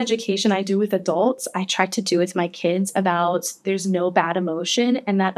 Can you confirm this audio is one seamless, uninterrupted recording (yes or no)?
yes